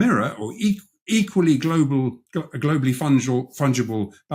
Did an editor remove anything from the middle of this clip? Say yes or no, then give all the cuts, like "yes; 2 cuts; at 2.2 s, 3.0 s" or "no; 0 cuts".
no; 0 cuts